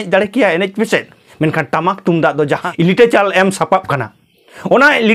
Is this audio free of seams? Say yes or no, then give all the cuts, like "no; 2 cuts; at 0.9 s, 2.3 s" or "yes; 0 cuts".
no; 2 cuts; at 1.2 s, 2.7 s